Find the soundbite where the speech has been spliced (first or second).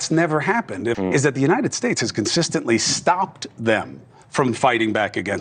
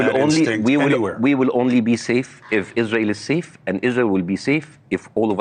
first